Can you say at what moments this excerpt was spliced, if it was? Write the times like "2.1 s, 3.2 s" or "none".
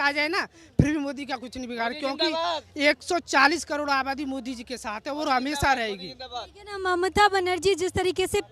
none